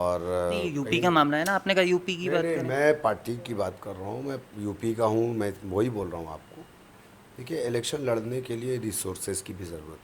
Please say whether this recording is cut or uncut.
uncut